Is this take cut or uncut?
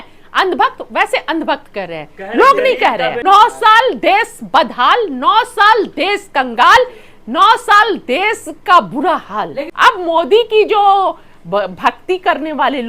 cut